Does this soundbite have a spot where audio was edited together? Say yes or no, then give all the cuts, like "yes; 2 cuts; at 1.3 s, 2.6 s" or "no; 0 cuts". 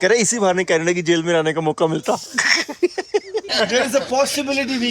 yes; 1 cut; at 3.5 s